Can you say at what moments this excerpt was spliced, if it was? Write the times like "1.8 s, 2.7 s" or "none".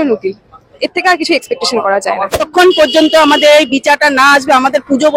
2.4 s